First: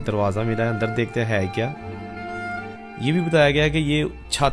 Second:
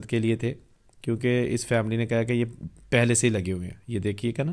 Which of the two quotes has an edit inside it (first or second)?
first